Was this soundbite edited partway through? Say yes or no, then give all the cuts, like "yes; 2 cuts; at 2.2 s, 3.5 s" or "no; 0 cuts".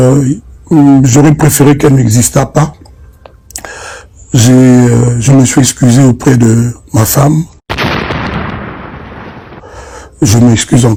no; 0 cuts